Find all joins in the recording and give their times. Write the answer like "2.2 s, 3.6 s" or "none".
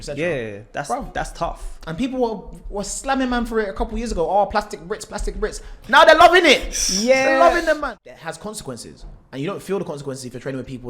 7.8 s